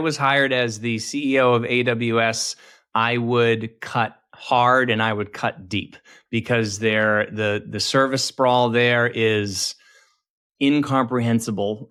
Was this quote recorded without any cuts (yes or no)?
yes